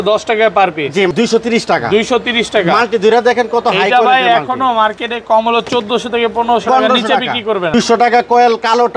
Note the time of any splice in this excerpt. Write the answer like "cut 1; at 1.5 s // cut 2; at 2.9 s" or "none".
cut 1; at 1.1 s // cut 2; at 7.7 s